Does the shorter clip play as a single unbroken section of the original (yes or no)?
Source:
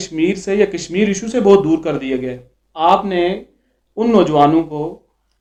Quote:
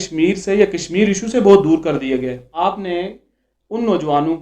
no